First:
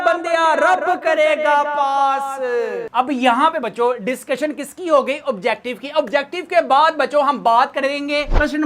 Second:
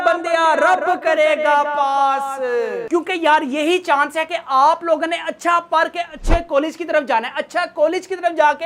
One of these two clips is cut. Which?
second; 1 cut; at 2.8 s

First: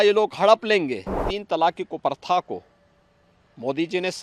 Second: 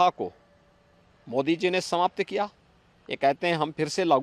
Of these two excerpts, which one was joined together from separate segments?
first; 1 cut; at 1.3 s

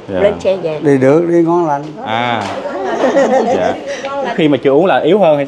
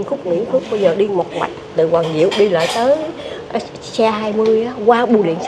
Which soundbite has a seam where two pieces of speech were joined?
first; 2 cuts; at 0.8 s, 4.4 s

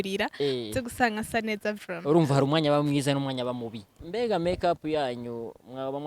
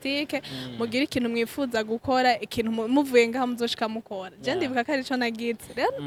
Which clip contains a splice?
first; 1 cut; at 4.0 s

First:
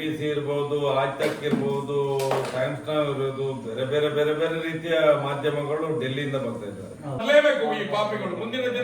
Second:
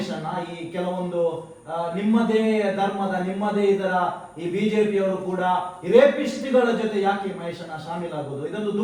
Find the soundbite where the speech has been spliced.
first; 1 cut; at 7.2 s

